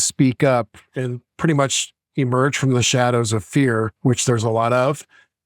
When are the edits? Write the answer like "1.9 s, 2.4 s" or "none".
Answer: none